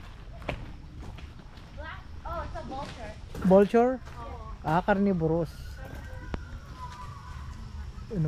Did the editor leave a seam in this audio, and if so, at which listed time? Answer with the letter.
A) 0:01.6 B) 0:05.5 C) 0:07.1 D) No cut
D